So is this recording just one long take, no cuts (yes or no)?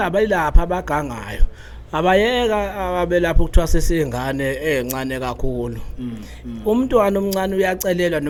yes